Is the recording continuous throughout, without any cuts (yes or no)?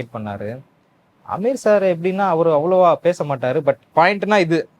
no